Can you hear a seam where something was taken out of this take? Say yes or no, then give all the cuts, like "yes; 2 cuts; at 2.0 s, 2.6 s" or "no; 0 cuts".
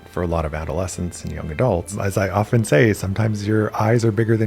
yes; 1 cut; at 2.0 s